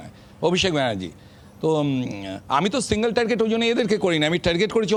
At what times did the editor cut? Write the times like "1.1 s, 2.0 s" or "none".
none

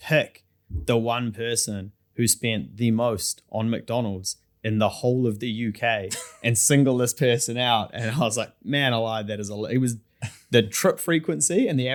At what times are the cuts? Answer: none

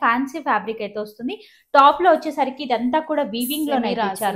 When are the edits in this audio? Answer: none

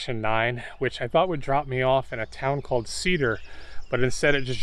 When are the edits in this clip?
none

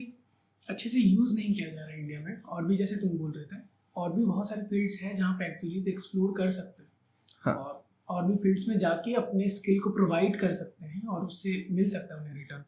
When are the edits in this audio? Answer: none

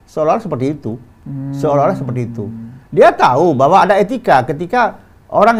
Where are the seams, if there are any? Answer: none

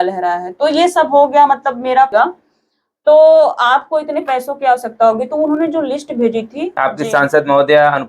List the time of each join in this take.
2.1 s, 6.7 s

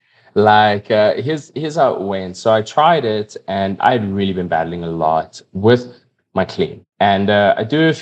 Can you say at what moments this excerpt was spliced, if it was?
3.8 s, 5.5 s, 6.8 s

